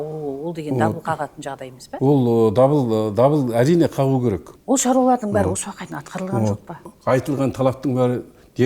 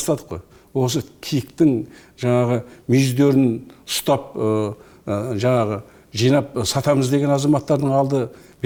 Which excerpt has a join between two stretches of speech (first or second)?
first